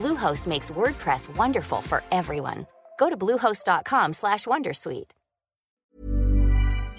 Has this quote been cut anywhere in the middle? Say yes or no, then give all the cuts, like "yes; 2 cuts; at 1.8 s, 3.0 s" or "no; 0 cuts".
yes; 1 cut; at 5.9 s